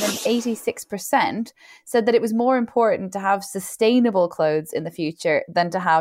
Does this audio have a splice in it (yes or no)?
no